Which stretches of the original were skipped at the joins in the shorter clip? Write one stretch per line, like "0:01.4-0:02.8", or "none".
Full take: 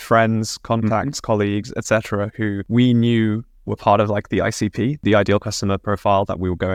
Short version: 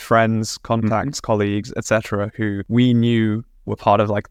none